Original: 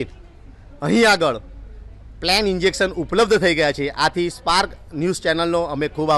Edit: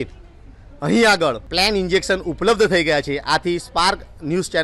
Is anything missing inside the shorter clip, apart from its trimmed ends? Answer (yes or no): yes